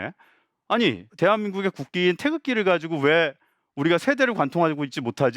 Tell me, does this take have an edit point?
yes; 1 cut; at 1.1 s

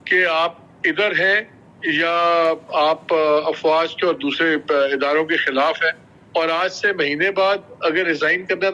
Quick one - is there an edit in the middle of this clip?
no; 0 cuts

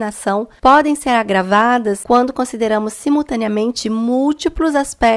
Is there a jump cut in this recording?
no; 0 cuts

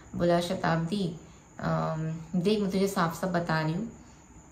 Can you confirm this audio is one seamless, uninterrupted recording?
yes; 0 cuts

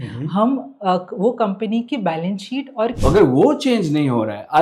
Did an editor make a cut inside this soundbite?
yes; 1 cut; at 3.0 s

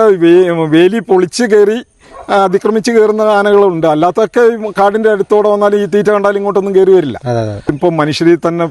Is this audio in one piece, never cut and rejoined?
no; 1 cut; at 7.8 s

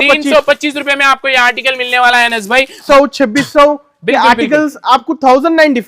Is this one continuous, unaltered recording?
no; 1 cut; at 2.8 s

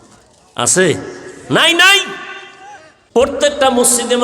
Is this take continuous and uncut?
no; 1 cut; at 3.2 s

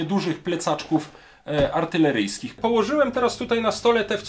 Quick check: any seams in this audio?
yes; 1 cut; at 2.6 s

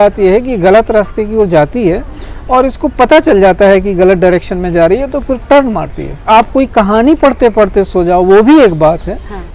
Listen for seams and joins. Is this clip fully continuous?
no; 1 cut; at 6.2 s

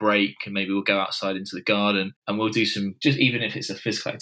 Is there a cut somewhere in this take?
yes; 1 cut; at 2.6 s

